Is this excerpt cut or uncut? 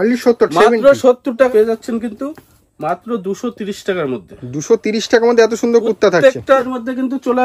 cut